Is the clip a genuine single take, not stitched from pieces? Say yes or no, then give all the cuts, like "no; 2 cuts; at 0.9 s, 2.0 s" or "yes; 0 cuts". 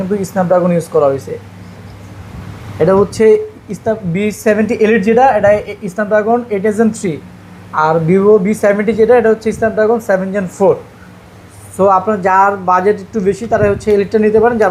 yes; 0 cuts